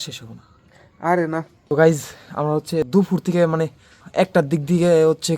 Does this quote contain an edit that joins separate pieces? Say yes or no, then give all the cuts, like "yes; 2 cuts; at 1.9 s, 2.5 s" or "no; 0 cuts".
yes; 3 cuts; at 1.6 s, 2.9 s, 4.0 s